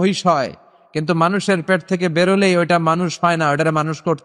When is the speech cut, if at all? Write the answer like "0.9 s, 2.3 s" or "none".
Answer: none